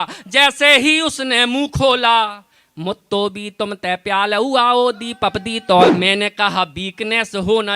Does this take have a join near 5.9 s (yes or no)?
yes